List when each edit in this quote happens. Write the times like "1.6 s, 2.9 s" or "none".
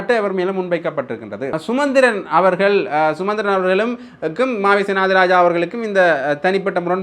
1.5 s